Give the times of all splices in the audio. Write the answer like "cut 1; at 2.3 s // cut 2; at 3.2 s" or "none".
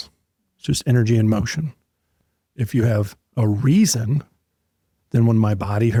none